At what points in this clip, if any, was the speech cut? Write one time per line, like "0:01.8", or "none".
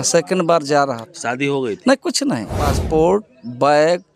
0:02.7